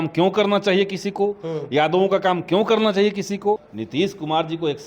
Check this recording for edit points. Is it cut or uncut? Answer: cut